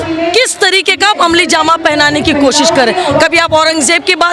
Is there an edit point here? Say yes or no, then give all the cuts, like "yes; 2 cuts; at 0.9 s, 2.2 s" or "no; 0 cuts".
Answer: no; 0 cuts